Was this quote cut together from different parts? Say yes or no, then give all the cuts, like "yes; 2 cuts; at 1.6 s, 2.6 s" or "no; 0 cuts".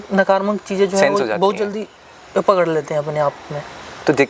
no; 0 cuts